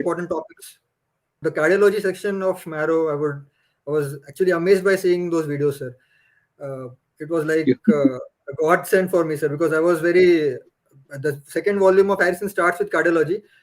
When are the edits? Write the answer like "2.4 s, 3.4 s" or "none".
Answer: 1.4 s